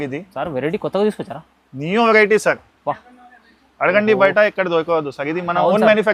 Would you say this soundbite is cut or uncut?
uncut